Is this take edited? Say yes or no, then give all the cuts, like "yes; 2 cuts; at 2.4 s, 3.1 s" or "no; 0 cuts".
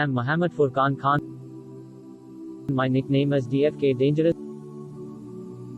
yes; 1 cut; at 4.4 s